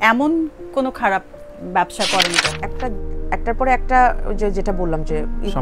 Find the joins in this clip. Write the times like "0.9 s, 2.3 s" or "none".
2.6 s